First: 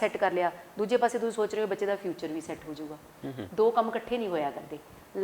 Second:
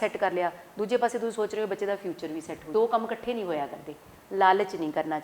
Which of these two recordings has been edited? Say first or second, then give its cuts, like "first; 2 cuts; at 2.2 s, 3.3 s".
second; 1 cut; at 2.6 s